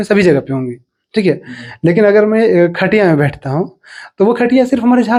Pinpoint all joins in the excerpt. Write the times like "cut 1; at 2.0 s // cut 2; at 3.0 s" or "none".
none